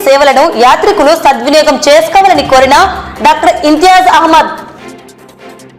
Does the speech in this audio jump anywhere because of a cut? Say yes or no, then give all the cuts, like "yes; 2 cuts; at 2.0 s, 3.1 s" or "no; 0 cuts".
no; 0 cuts